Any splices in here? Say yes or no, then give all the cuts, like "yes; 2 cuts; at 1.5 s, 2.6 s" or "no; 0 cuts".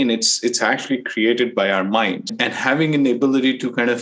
yes; 1 cut; at 2.3 s